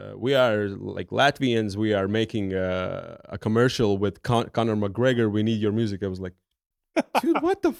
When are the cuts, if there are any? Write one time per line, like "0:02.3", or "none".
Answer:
none